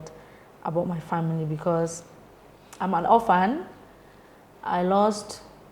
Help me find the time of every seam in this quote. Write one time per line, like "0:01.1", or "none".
none